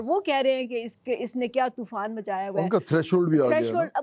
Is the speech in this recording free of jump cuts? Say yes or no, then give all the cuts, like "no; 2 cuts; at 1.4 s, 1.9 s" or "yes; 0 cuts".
yes; 0 cuts